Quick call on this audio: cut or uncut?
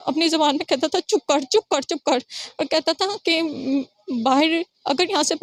uncut